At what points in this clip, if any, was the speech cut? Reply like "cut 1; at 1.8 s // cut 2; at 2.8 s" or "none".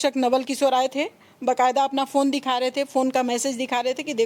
none